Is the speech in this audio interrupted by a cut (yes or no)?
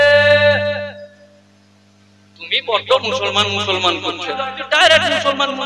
yes